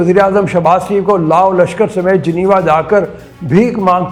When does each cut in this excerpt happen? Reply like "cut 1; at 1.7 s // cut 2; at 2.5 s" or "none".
none